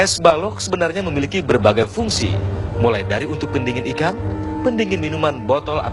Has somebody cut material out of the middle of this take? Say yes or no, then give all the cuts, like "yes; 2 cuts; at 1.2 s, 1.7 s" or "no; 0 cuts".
no; 0 cuts